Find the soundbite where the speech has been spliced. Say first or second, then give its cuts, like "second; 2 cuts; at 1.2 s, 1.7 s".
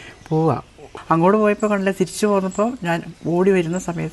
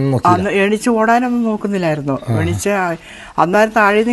first; 1 cut; at 0.9 s